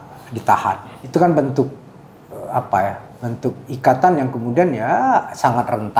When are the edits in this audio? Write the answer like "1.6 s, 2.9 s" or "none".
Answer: 0.9 s